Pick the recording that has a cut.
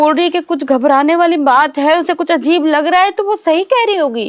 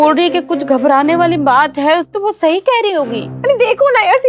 second; 2 cuts; at 2.1 s, 3.3 s

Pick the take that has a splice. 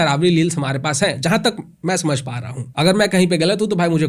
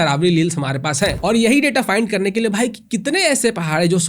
second; 1 cut; at 1.2 s

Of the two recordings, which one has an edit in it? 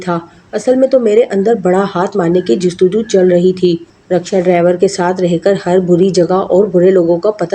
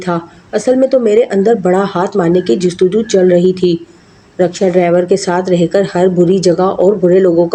first; 1 cut; at 3.9 s

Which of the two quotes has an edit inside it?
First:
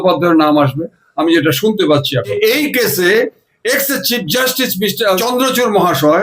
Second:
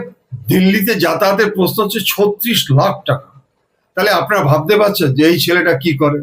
first; 2 cuts; at 2.3 s, 5.2 s

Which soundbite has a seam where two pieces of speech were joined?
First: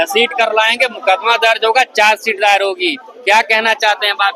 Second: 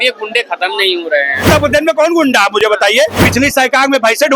second; 2 cuts; at 1.4 s, 3.2 s

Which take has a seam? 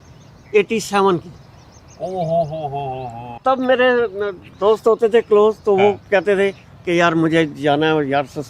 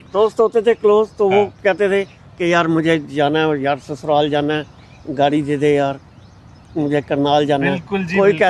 first; 1 cut; at 3.4 s

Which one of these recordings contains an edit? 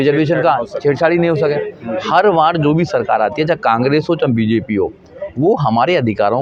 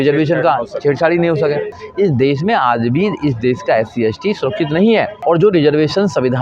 second; 2 cuts; at 1.8 s, 5.1 s

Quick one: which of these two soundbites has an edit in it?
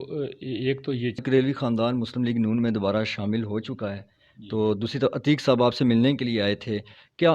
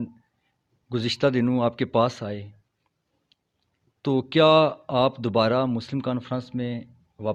first; 1 cut; at 1.2 s

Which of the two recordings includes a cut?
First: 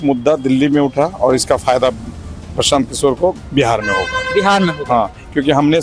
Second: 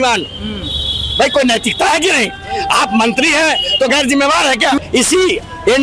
second; 1 cut; at 4.8 s

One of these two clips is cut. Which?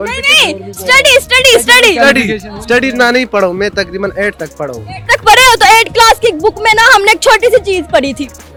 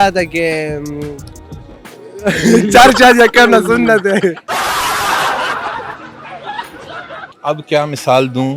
second; 2 cuts; at 4.5 s, 7.3 s

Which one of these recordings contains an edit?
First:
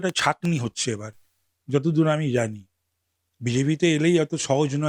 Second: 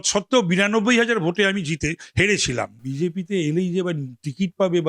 second; 1 cut; at 2.8 s

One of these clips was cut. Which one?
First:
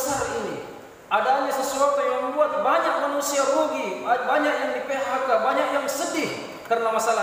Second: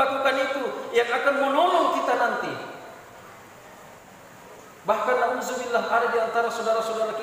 second; 1 cut; at 4.0 s

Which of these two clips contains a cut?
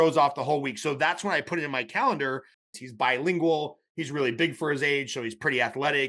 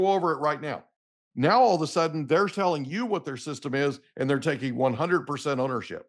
first; 1 cut; at 2.6 s

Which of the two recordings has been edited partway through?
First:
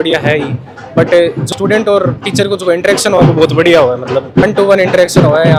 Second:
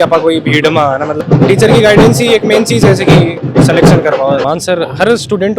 second; 2 cuts; at 1.2 s, 4.4 s

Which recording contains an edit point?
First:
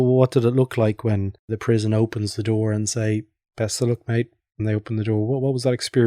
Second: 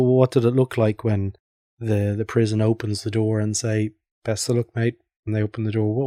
first; 1 cut; at 1.5 s

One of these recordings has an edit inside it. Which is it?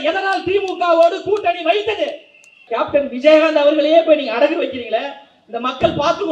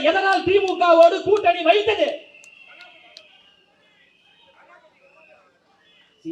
first; 1 cut; at 2.6 s

